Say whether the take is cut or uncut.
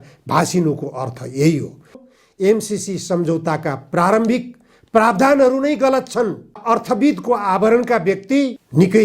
cut